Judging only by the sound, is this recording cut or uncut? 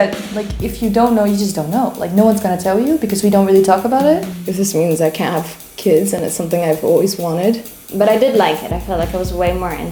cut